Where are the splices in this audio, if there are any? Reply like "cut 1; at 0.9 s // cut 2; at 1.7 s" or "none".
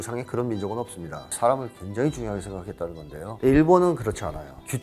cut 1; at 1.2 s // cut 2; at 3.3 s